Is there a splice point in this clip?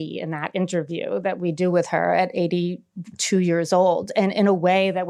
no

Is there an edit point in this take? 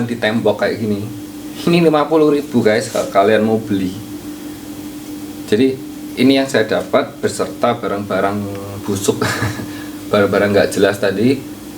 yes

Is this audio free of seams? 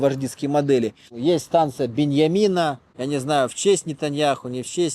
no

